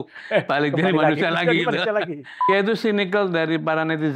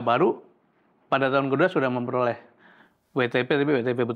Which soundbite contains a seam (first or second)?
first